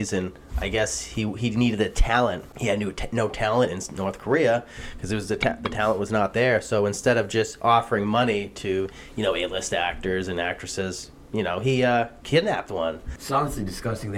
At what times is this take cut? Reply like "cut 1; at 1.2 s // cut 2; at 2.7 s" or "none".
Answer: cut 1; at 2.5 s // cut 2; at 13.1 s

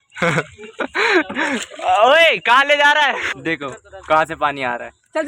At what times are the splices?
cut 1; at 3.3 s

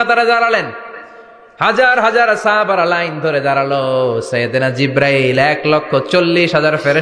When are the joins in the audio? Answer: none

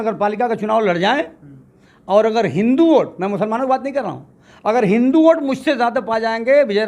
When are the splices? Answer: none

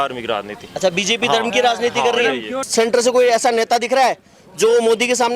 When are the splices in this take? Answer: cut 1; at 2.6 s

